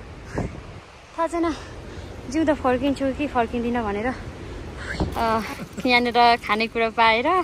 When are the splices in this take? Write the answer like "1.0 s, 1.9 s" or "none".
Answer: 5.1 s